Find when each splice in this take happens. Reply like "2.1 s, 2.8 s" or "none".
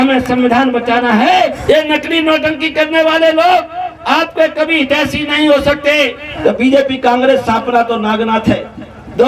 1.5 s, 6.2 s